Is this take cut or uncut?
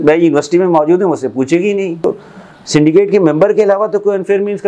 cut